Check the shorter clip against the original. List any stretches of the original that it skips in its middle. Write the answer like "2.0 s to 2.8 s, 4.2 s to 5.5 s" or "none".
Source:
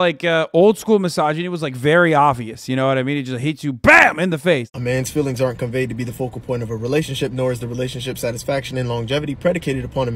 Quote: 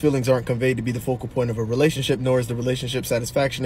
none